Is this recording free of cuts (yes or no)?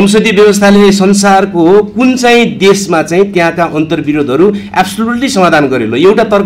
yes